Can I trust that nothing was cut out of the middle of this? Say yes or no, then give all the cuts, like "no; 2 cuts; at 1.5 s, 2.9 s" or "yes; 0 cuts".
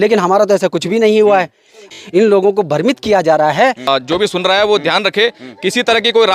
no; 2 cuts; at 1.9 s, 3.9 s